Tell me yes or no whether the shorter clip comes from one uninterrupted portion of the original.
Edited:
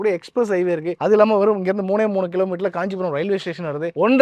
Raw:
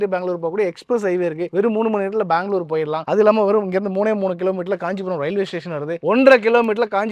no